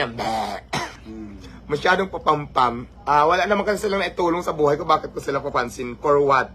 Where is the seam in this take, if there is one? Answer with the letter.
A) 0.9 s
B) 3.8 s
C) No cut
A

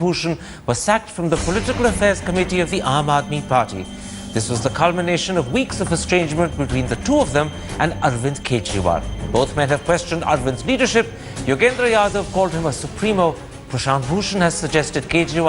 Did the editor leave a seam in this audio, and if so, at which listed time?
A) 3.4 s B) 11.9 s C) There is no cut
A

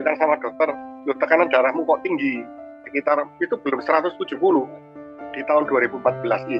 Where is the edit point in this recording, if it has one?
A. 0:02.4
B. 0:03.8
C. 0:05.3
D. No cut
C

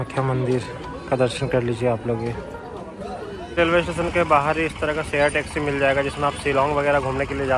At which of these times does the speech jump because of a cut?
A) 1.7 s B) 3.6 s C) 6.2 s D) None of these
B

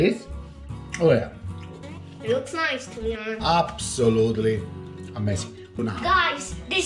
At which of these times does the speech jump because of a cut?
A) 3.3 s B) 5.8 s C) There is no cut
B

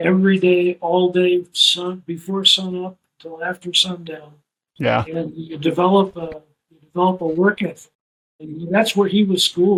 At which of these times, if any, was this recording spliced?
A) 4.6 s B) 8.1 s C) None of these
C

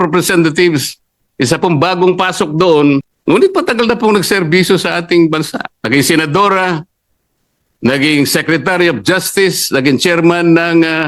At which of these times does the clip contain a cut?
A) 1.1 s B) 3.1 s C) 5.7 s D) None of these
B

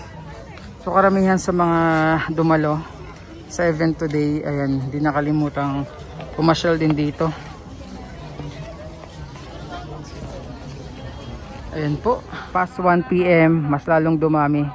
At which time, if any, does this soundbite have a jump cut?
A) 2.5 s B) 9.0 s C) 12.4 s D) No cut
C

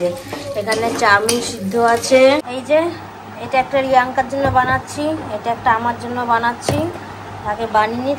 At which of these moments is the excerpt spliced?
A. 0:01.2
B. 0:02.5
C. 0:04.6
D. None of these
B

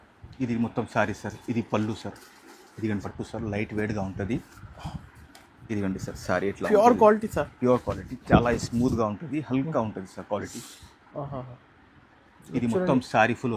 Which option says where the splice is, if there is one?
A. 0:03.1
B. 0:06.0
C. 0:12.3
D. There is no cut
A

